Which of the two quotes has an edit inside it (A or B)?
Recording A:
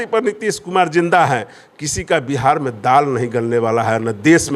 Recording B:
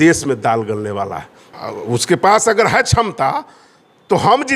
B